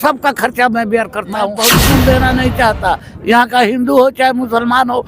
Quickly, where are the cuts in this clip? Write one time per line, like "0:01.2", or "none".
0:01.7